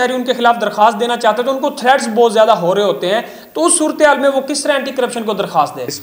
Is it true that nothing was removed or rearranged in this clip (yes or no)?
yes